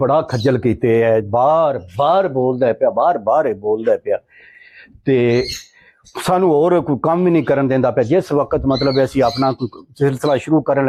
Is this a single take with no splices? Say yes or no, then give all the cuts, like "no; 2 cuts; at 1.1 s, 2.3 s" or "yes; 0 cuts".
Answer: yes; 0 cuts